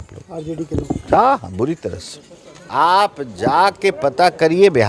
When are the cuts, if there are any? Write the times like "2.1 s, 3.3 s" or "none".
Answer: 2.6 s